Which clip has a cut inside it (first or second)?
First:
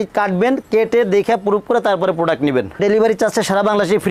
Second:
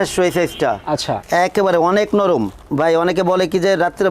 second